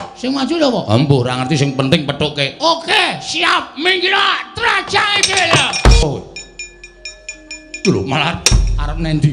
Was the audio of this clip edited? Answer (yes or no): yes